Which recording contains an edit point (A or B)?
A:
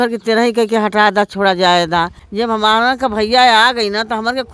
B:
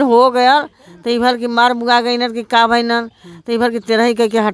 A